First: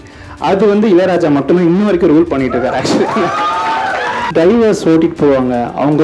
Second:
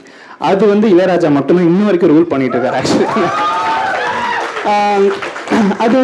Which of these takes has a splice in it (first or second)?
first